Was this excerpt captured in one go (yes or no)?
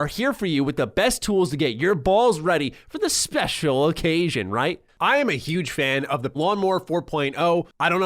no